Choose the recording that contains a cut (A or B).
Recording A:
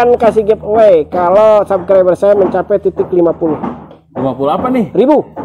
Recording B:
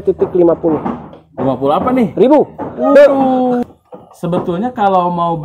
B